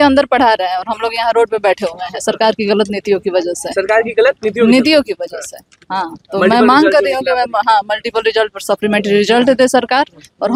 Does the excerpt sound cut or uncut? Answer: uncut